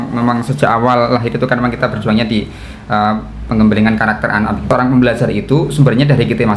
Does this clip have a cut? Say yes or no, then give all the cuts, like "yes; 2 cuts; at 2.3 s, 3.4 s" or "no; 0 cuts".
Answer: yes; 1 cut; at 4.7 s